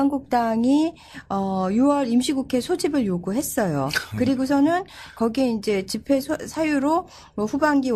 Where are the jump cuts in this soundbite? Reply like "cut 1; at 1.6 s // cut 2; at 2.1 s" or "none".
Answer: cut 1; at 1.5 s